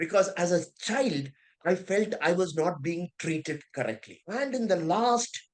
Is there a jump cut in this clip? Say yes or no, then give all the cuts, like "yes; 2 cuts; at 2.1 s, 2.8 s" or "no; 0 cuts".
yes; 1 cut; at 4.1 s